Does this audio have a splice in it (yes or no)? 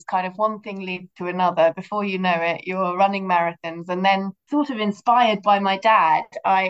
yes